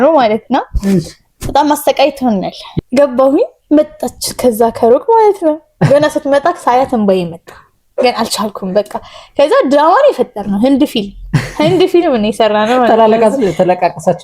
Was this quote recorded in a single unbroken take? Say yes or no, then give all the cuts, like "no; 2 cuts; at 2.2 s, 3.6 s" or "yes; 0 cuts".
no; 1 cut; at 2.6 s